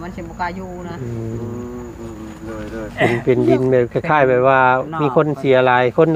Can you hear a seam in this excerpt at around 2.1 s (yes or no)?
no